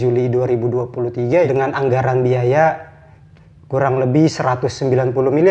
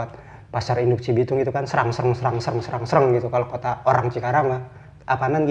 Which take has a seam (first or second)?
first